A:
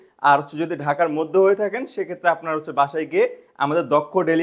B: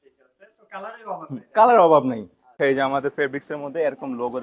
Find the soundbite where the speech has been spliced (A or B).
B